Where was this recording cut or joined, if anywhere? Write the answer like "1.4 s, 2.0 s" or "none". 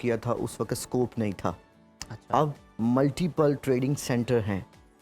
none